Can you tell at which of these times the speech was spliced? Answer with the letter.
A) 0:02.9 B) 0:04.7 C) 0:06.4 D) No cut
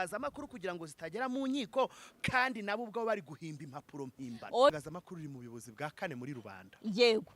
B